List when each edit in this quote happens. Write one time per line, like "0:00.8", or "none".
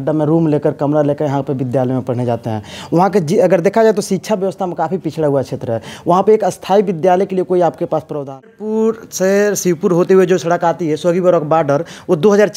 0:08.6